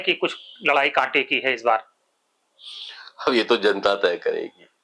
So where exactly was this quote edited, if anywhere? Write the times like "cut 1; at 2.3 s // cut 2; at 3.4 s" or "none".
none

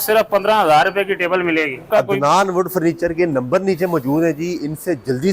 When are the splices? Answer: cut 1; at 1.9 s

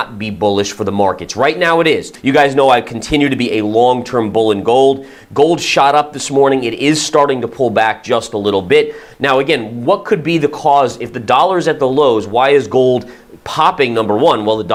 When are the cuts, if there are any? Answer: none

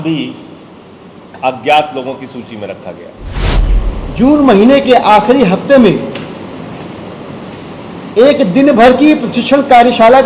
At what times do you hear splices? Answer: cut 1; at 3.6 s

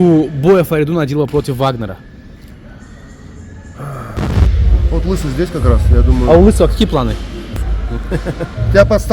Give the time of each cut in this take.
cut 1; at 4.3 s // cut 2; at 7.6 s

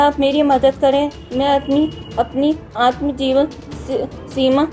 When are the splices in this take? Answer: cut 1; at 1.2 s

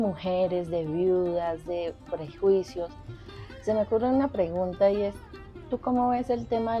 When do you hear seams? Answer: none

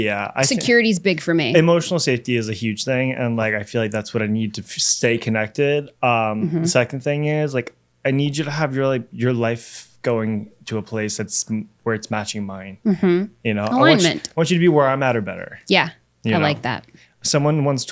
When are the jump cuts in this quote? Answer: none

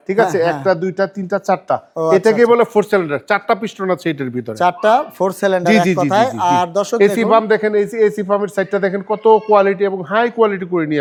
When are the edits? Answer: none

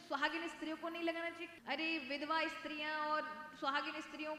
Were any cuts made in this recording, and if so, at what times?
cut 1; at 1.4 s

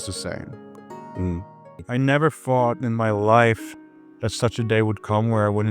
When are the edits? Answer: cut 1; at 1.8 s

